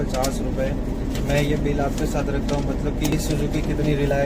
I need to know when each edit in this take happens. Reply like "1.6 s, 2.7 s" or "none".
3.1 s